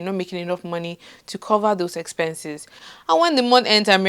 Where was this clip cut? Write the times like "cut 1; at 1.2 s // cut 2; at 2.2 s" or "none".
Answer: cut 1; at 2.7 s